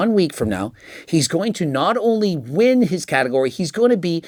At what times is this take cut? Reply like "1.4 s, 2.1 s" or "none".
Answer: none